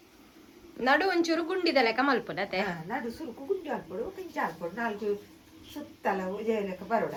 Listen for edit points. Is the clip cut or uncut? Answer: uncut